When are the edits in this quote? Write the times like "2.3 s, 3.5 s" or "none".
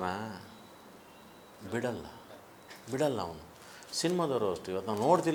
none

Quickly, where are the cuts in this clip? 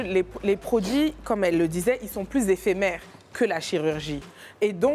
none

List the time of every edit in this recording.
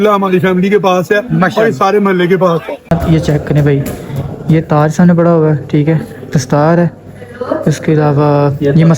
2.9 s

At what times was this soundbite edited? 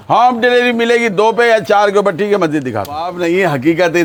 none

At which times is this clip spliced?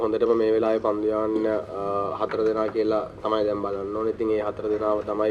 none

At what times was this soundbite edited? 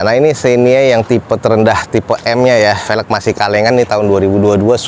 none

